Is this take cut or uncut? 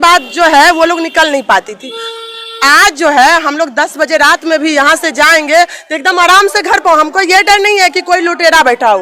uncut